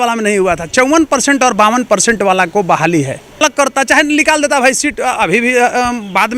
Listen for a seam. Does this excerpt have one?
yes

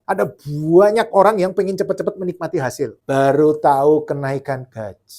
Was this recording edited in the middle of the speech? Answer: yes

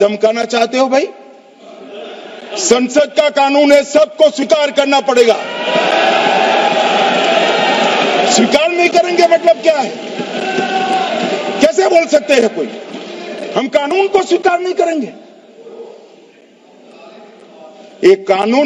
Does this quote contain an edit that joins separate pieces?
no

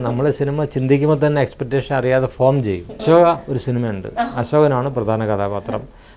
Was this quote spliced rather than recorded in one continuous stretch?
yes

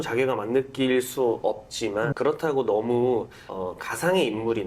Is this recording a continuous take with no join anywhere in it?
no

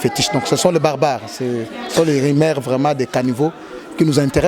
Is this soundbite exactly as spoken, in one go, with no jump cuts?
yes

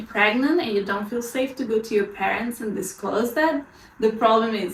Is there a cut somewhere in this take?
no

